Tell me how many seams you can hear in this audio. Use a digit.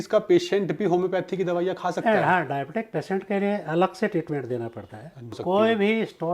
1